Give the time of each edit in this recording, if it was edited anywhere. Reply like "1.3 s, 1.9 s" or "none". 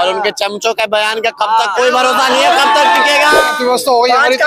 3.5 s